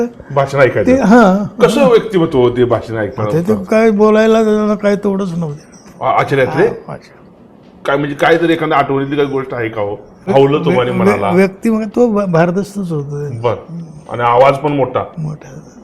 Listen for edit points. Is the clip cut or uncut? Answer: uncut